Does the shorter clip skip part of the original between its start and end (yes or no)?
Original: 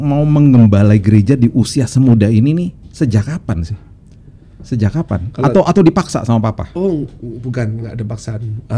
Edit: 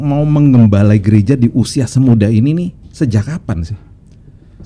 no